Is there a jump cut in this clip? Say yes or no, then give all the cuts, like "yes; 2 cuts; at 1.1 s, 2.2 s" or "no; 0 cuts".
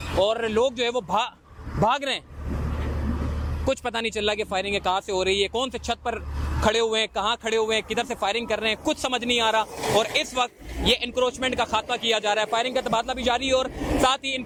no; 0 cuts